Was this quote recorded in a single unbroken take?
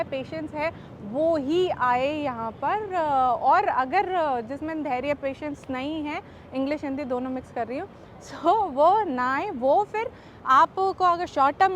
yes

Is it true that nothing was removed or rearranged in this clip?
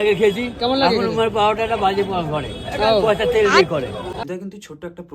no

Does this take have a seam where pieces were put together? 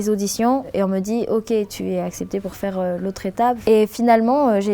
yes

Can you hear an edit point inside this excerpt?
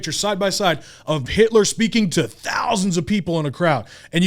yes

